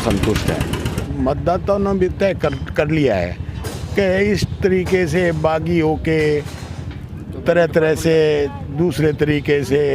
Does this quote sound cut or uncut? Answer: cut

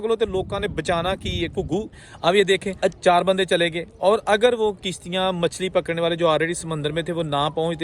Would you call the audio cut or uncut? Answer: cut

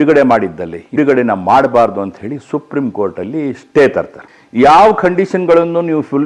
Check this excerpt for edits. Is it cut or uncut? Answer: cut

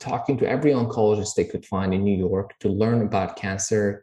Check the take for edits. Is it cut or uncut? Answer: uncut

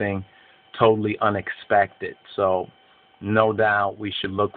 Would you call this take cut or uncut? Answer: cut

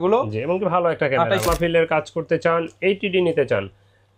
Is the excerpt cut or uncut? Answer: cut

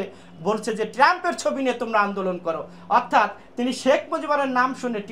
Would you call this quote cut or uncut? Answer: uncut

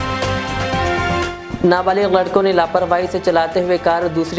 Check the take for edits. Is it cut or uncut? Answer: cut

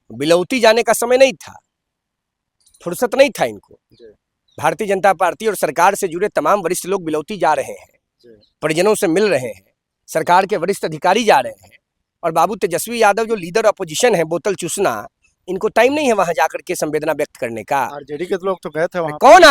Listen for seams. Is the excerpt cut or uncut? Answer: uncut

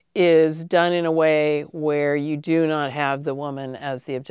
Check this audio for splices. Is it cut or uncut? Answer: uncut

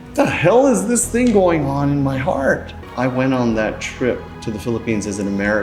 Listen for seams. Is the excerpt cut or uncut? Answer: cut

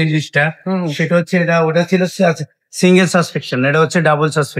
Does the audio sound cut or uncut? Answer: uncut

